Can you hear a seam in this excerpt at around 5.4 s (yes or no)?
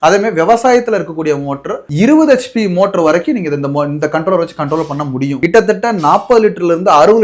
yes